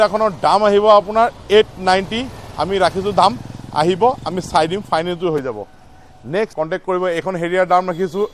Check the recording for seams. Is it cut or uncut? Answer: cut